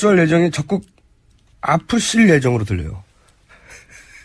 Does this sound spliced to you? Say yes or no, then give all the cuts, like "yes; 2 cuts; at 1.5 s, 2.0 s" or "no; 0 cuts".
yes; 1 cut; at 2.7 s